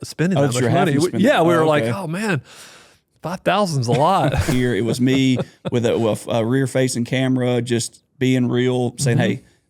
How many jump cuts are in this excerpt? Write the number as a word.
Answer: one